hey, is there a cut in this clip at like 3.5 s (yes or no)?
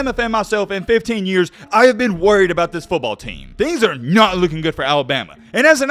yes